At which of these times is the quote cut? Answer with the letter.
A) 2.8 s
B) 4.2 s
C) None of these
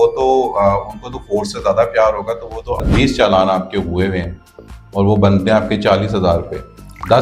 A